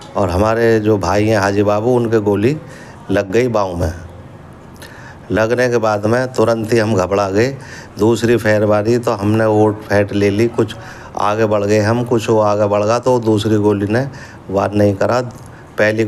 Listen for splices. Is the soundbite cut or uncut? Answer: uncut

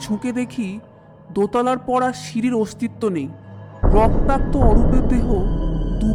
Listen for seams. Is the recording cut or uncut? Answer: uncut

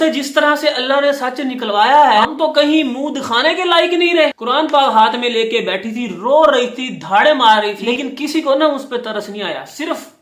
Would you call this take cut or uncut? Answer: cut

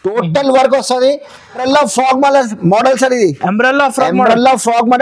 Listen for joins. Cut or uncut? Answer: cut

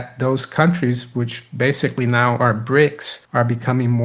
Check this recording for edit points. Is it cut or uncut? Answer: uncut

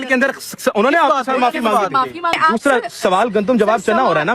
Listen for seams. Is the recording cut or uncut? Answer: cut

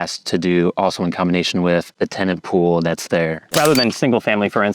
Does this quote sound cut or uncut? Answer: cut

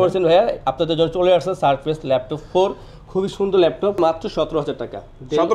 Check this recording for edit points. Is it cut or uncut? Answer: cut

